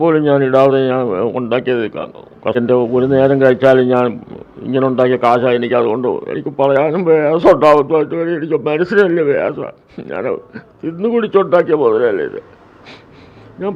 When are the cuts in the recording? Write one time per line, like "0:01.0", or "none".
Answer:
0:02.5